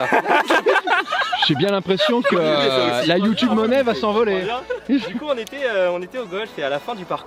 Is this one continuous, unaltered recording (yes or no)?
yes